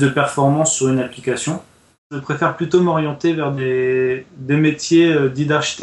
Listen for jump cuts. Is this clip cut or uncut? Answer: cut